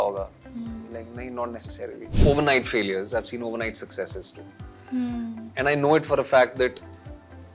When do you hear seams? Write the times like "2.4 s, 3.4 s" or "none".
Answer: 2.1 s